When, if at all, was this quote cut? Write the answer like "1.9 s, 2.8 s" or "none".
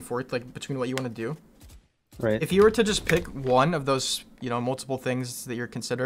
none